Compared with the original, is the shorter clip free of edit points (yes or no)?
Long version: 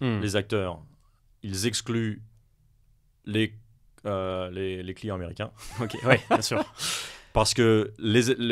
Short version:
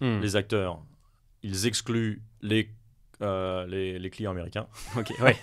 no